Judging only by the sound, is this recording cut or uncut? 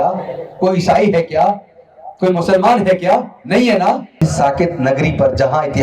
cut